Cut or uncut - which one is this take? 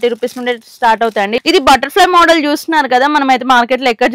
cut